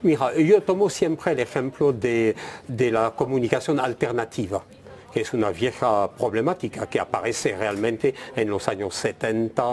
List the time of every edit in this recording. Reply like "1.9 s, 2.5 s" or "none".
7.8 s